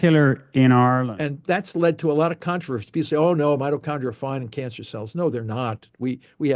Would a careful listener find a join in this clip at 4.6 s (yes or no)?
no